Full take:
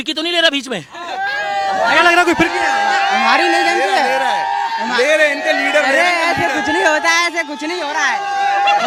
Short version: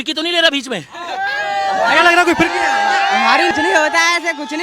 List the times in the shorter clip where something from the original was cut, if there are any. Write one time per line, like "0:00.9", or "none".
0:03.5